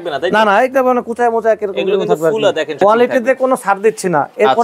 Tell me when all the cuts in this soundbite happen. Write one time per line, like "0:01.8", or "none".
0:02.7